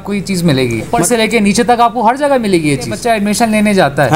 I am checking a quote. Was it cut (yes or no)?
yes